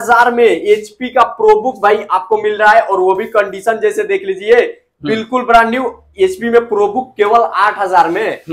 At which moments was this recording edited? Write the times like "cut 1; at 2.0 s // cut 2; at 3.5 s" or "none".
none